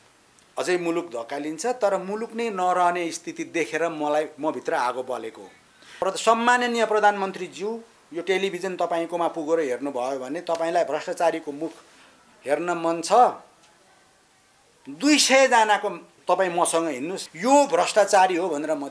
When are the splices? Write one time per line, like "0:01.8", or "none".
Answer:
0:06.0
0:16.1
0:17.2